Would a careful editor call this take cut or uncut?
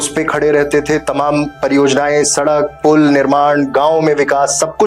uncut